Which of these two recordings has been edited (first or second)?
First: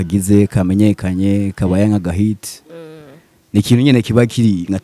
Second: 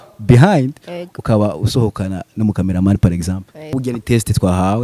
second